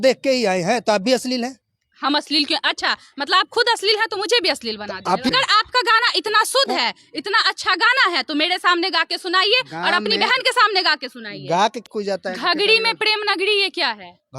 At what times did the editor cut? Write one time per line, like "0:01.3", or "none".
0:05.3
0:11.8

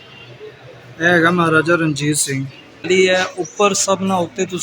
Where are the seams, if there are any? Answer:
0:02.8

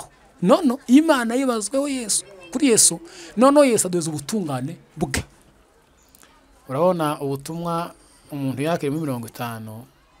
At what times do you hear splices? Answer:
0:05.5

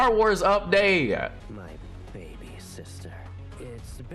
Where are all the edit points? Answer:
0:01.4

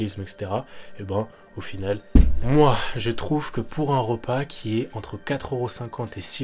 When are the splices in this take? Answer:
0:02.0

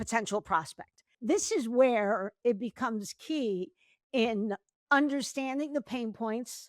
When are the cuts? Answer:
0:01.1

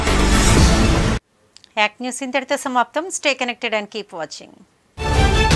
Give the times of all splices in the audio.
none

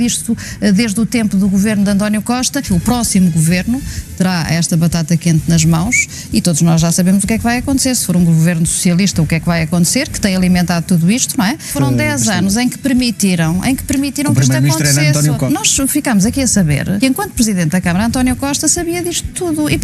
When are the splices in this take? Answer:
0:02.7
0:11.7
0:15.4
0:17.0

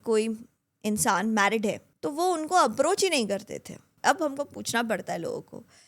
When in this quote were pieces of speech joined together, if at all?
0:01.9
0:03.8

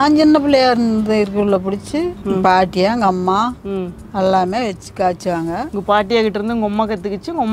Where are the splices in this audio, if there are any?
none

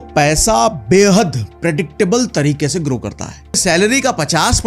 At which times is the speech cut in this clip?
0:03.6

